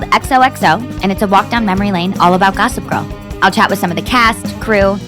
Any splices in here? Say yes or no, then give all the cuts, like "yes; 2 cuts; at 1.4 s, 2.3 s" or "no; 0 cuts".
no; 0 cuts